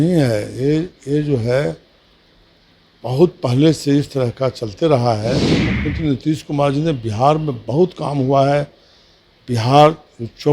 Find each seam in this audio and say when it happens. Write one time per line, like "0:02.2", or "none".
0:05.7